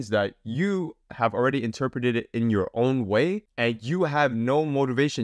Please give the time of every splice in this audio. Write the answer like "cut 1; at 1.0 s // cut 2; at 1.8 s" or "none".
none